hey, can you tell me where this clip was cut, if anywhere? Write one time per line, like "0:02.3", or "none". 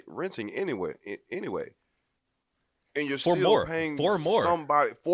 none